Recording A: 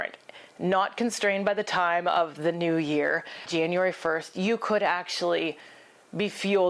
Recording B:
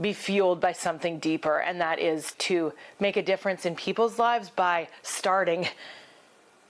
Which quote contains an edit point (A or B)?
B